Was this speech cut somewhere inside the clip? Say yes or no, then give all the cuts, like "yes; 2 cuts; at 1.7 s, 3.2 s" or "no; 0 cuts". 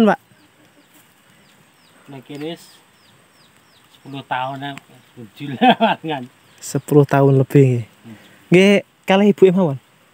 no; 0 cuts